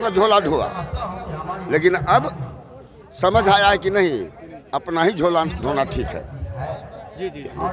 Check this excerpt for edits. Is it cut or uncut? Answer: uncut